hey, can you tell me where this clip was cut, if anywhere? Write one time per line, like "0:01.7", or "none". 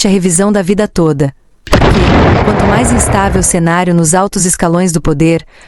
0:01.6
0:02.6